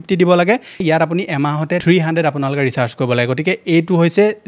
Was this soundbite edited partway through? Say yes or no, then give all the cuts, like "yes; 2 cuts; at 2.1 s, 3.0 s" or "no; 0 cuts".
no; 0 cuts